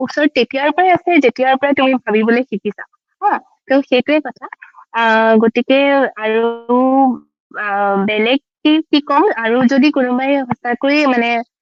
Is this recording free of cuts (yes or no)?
yes